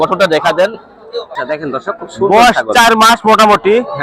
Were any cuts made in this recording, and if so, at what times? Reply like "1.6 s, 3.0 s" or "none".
1.3 s